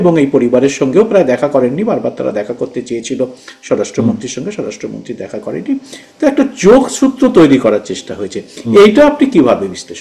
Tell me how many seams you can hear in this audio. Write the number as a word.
zero